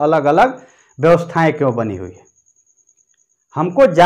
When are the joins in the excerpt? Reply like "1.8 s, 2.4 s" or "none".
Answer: none